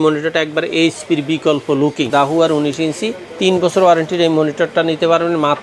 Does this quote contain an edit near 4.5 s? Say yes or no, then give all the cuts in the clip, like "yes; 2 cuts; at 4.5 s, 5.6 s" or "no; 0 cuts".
no; 1 cut; at 2.1 s